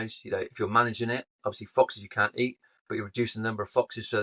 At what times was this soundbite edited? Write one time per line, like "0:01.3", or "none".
none